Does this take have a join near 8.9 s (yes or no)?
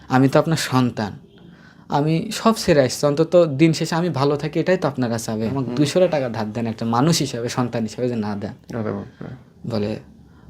no